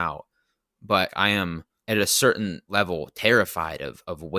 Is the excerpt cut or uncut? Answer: cut